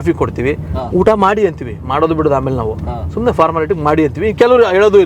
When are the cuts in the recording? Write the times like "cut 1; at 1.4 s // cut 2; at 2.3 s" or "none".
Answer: none